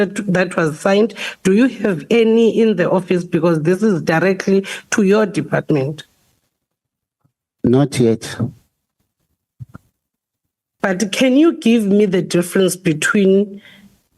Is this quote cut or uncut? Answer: cut